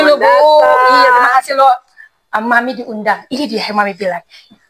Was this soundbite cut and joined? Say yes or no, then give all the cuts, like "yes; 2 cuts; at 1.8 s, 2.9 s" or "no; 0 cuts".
no; 0 cuts